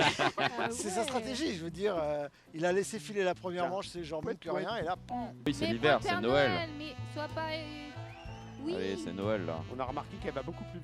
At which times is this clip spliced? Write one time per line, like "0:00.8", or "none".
0:05.5

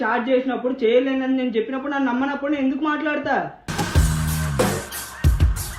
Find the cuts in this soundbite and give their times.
none

